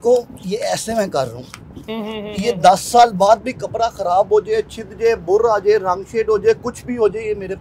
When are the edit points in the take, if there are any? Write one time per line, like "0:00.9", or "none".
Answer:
none

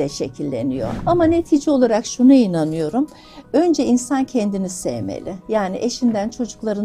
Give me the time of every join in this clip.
0:00.9

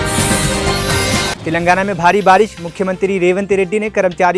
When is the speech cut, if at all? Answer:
0:01.3

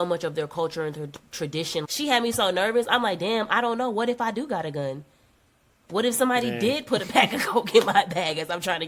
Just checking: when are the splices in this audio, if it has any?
0:01.9

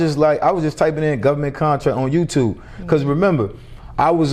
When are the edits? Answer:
none

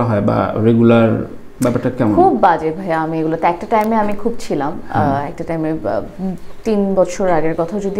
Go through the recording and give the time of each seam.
none

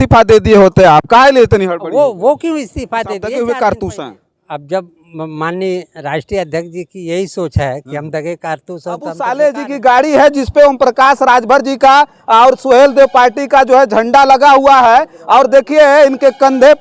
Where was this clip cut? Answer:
0:03.3
0:09.2

